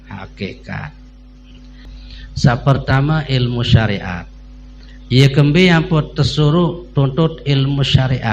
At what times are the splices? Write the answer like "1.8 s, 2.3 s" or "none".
1.9 s